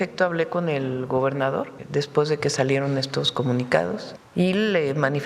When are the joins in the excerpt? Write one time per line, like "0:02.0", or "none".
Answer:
0:01.8
0:04.1